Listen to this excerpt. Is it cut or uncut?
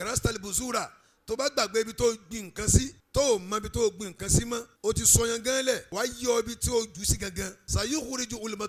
cut